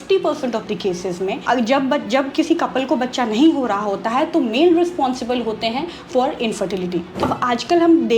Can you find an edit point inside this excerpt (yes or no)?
yes